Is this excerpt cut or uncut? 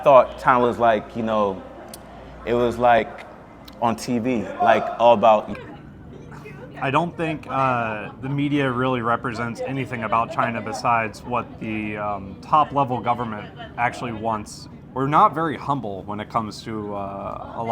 cut